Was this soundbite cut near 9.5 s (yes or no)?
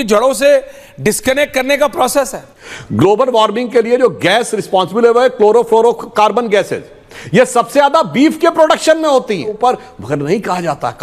yes